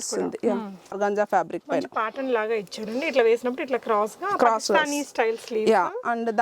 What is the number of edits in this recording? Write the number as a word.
one